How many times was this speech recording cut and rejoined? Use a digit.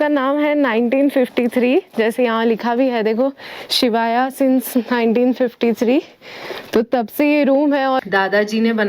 1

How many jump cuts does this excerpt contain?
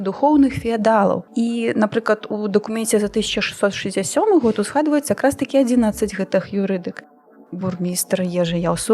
2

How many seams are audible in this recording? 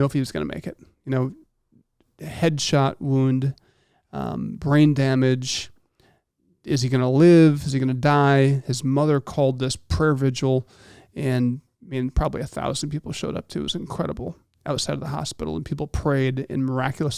0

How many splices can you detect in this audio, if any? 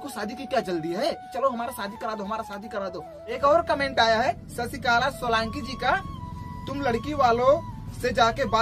2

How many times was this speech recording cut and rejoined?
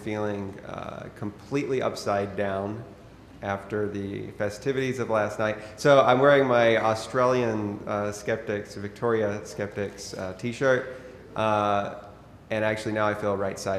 1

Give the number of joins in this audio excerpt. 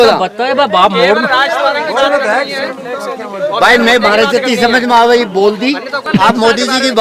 1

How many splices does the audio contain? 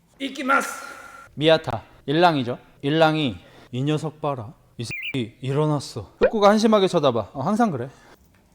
1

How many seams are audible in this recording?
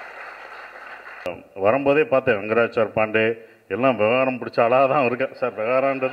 1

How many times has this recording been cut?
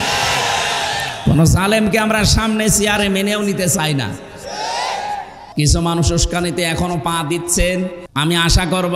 2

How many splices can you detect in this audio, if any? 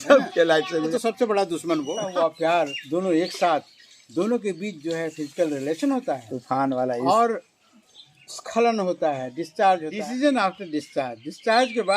3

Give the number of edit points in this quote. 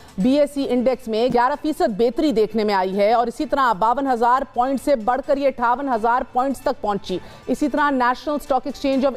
1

